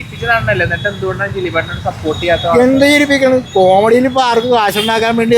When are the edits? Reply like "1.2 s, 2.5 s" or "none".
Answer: none